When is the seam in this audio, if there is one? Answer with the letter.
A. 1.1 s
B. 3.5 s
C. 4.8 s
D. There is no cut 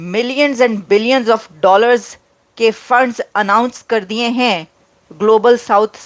D